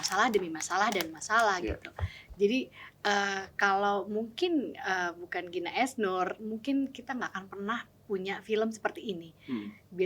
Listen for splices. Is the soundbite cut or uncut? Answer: cut